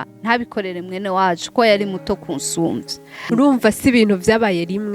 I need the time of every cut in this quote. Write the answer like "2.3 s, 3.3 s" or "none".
3.3 s